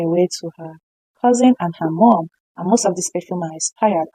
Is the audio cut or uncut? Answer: uncut